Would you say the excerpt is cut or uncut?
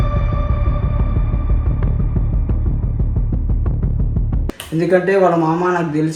uncut